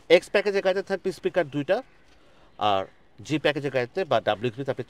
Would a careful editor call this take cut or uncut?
uncut